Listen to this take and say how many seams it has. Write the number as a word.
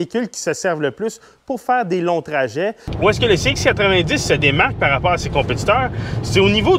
one